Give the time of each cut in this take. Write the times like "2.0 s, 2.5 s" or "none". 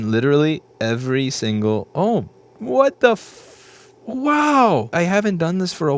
4.9 s